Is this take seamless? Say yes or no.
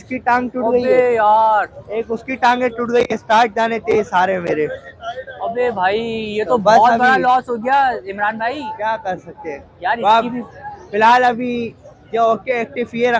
yes